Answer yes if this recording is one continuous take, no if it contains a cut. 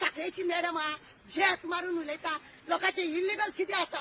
no